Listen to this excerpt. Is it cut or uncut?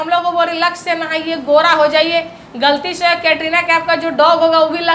uncut